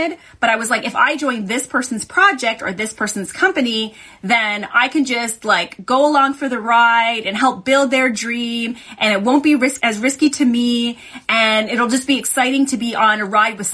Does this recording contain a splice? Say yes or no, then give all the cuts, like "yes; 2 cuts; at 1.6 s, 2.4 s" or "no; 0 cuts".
yes; 1 cut; at 9.8 s